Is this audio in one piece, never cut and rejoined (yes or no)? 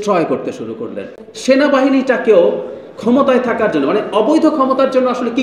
no